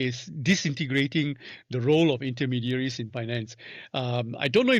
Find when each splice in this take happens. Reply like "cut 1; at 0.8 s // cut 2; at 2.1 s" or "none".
none